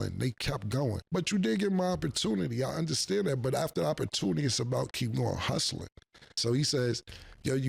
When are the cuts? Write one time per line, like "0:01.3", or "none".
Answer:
0:01.0
0:06.3